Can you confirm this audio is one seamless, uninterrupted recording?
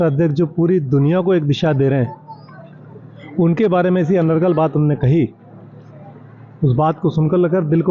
yes; 0 cuts

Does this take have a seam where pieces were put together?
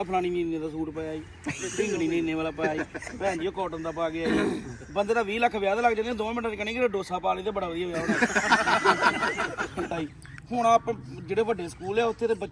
yes; 1 cut; at 9.9 s

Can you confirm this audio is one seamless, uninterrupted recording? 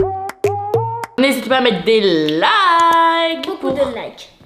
no; 1 cut; at 1.2 s

